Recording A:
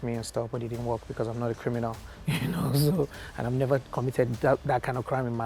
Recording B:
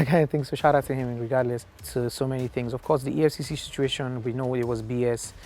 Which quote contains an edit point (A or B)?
B